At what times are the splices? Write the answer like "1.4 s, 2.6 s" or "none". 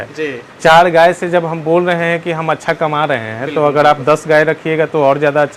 none